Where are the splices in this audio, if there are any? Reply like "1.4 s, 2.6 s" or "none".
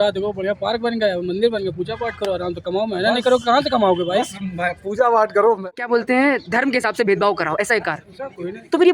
5.7 s